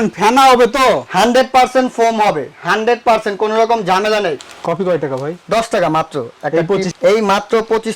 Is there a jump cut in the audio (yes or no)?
yes